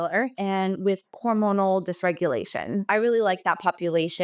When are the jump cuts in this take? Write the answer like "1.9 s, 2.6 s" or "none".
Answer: 1.2 s, 2.8 s

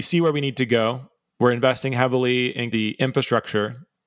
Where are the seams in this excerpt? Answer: 2.7 s

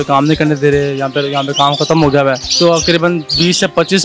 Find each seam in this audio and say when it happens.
2.5 s

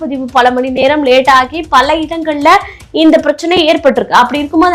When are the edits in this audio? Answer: none

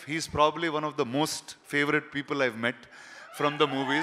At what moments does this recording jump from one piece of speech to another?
none

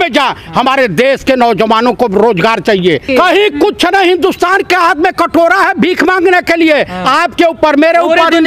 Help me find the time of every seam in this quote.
3.1 s

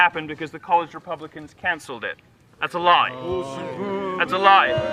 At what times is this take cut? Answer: 2.5 s

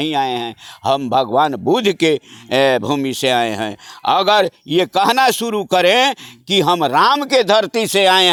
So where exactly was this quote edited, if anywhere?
none

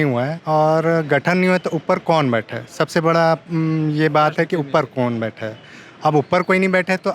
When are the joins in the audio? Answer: none

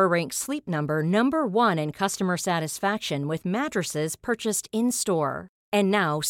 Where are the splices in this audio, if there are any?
none

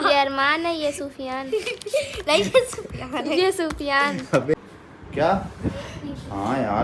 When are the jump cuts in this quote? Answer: 4.5 s

